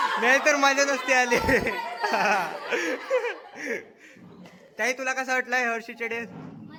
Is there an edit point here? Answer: no; 0 cuts

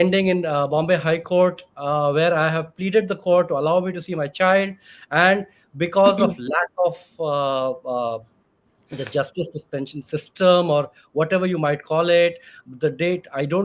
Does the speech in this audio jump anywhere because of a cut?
no; 0 cuts

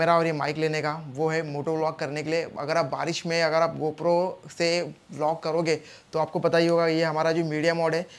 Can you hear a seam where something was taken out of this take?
no; 0 cuts

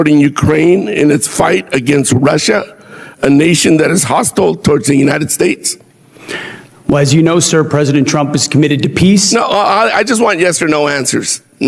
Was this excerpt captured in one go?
yes; 0 cuts

